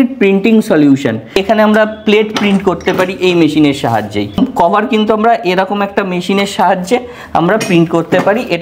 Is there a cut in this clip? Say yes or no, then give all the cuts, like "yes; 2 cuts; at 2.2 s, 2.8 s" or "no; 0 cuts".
yes; 2 cuts; at 1.3 s, 4.4 s